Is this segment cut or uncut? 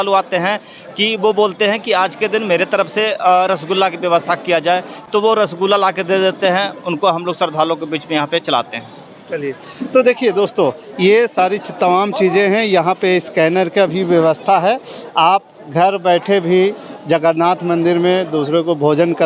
uncut